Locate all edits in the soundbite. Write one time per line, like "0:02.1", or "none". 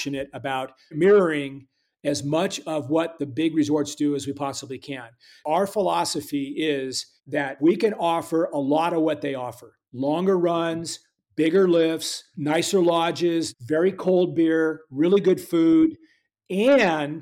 0:05.4
0:07.6
0:13.6